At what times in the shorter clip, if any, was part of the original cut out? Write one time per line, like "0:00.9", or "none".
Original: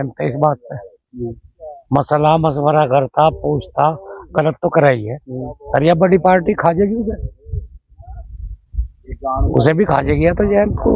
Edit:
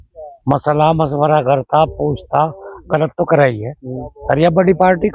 none